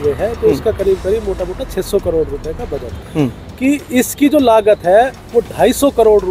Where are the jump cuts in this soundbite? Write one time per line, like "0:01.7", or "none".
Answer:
0:03.0